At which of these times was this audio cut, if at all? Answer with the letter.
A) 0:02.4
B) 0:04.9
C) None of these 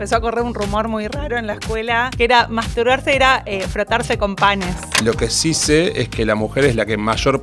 B